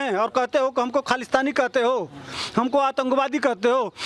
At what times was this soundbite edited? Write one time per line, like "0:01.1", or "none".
none